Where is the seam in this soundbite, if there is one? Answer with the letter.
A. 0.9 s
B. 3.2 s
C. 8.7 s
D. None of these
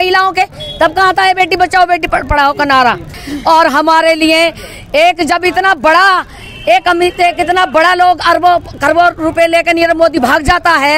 B